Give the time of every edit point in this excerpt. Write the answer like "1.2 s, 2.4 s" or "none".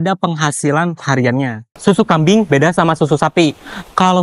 1.7 s